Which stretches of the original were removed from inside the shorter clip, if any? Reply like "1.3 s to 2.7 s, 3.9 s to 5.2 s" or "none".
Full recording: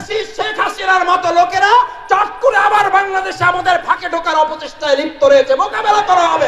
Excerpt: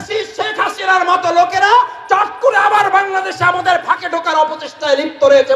none